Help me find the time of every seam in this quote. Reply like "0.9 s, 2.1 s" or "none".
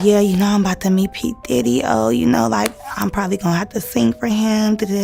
none